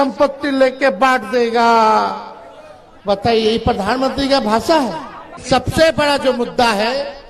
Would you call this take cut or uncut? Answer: cut